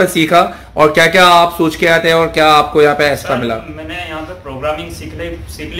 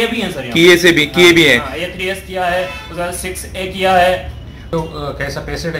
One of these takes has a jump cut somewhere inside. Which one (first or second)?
second